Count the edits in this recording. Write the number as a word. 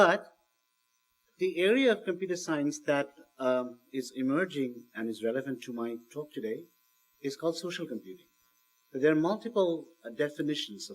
one